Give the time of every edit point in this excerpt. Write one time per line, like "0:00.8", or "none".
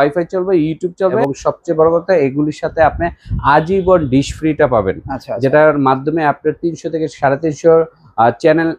0:01.2